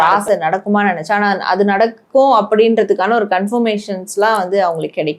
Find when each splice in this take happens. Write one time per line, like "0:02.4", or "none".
none